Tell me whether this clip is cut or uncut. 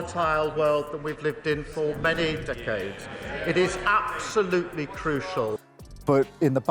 cut